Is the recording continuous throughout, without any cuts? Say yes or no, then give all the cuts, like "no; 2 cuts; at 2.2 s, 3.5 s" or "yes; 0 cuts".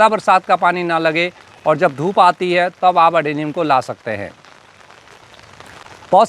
yes; 0 cuts